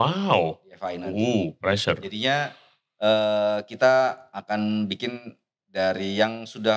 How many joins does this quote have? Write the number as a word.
zero